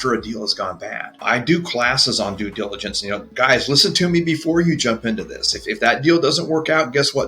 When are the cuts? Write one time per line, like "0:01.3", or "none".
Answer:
0:01.2
0:03.3